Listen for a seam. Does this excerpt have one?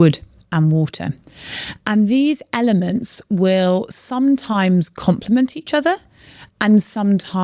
no; 0 cuts

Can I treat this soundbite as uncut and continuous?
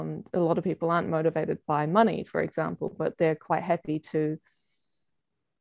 yes; 0 cuts

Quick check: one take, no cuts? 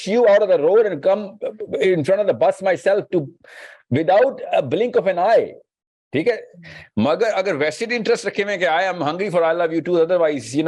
yes; 0 cuts

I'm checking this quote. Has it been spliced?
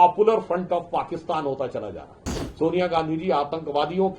yes; 1 cut; at 2.5 s

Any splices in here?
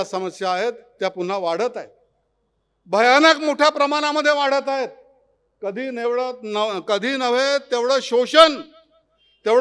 no; 0 cuts

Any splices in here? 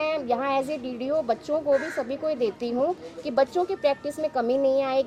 no; 0 cuts

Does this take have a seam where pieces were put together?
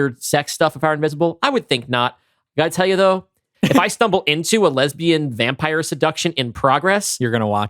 no; 0 cuts

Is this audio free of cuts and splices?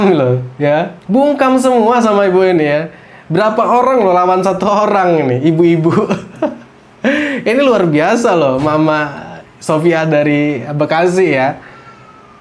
yes; 0 cuts

